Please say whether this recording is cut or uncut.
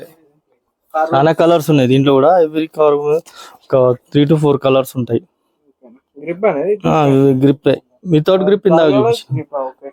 uncut